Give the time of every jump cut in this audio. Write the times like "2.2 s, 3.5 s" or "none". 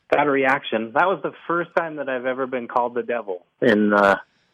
3.5 s